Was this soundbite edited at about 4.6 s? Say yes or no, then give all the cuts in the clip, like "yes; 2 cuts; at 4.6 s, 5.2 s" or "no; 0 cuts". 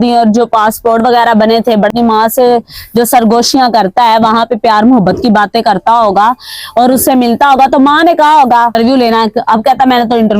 no; 2 cuts; at 1.9 s, 8.8 s